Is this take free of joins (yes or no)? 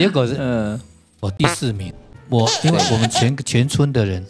no